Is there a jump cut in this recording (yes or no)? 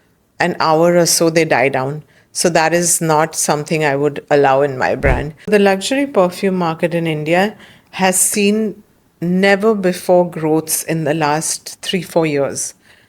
yes